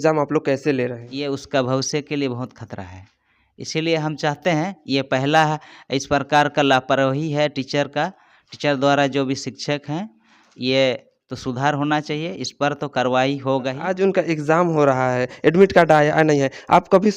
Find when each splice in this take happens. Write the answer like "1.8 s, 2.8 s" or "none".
1.1 s, 13.8 s